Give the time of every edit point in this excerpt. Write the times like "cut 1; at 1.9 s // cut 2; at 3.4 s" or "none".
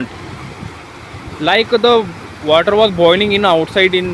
none